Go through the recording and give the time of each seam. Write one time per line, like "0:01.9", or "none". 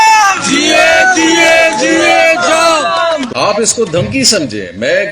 0:03.3

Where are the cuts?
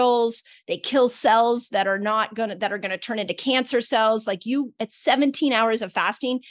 none

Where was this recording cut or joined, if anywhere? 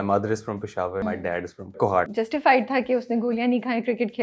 0:01.0
0:02.1

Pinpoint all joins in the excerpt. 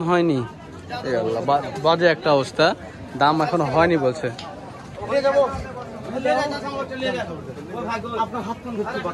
none

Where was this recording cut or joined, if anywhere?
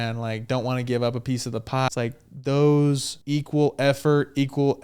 0:01.9
0:03.1

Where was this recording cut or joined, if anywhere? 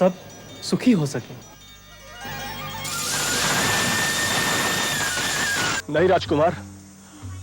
0:05.8

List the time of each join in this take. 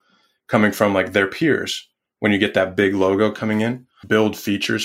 0:03.9

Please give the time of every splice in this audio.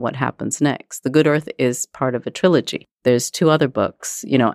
0:02.8

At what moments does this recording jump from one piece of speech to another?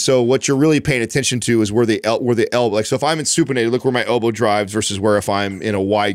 none

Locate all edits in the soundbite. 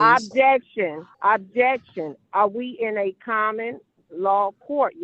0:01.1

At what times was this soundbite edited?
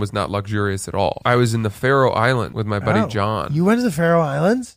0:01.2
0:02.5

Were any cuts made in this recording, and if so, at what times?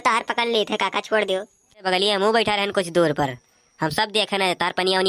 0:01.9

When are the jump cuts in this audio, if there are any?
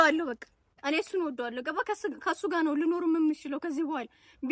none

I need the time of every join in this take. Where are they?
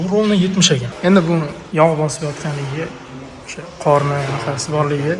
0:00.9
0:01.6

